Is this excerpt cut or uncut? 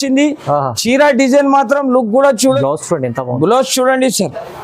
cut